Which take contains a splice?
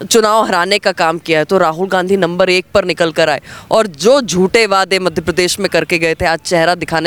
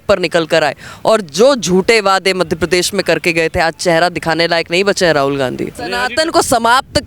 second; 1 cut; at 6.0 s

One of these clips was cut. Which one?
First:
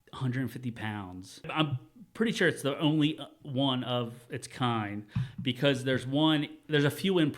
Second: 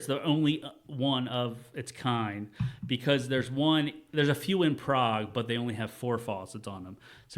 first; 1 cut; at 1.5 s

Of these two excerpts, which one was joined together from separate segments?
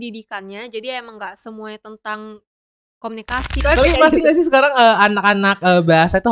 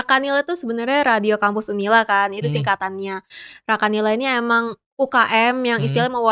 first; 1 cut; at 3.5 s

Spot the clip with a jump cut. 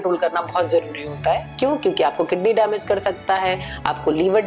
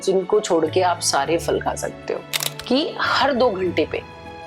second; 1 cut; at 2.4 s

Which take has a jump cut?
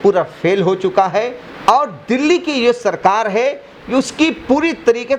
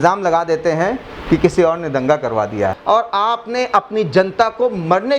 second; 1 cut; at 2.8 s

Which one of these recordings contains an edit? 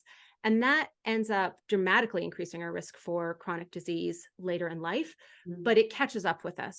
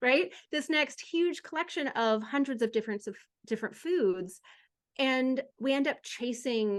first; 1 cut; at 1.6 s

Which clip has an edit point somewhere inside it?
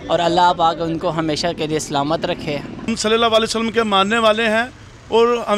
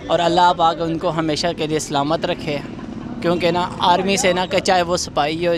first; 1 cut; at 2.9 s

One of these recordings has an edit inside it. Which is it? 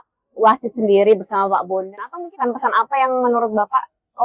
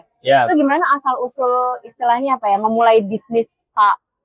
first; 1 cut; at 2.1 s

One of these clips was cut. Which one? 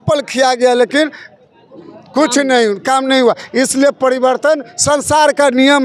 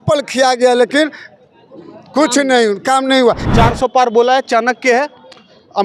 second; 1 cut; at 3.4 s

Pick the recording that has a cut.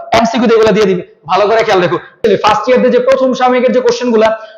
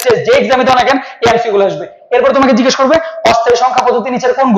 first; 1 cut; at 2.2 s

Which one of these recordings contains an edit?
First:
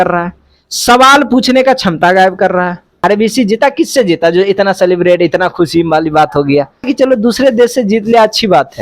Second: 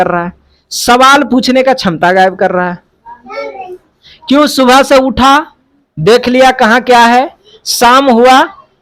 first; 2 cuts; at 3.0 s, 6.9 s

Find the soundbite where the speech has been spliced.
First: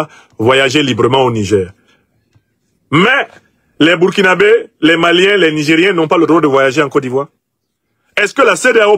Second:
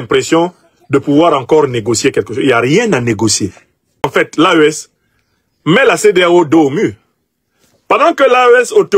second; 1 cut; at 4.1 s

